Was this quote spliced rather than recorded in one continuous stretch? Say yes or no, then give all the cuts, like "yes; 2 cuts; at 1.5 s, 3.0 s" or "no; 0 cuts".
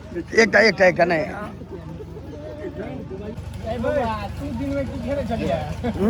no; 0 cuts